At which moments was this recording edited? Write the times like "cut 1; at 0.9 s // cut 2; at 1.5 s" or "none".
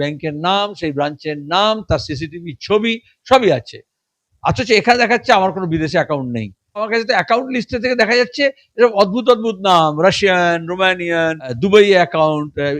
cut 1; at 6.9 s // cut 2; at 11.5 s